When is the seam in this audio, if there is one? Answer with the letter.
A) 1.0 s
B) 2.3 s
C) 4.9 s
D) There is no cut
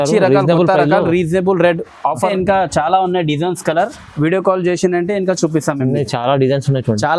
B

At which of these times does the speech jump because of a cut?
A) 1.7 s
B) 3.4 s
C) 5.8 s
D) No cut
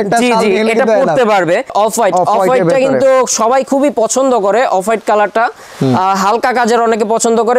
A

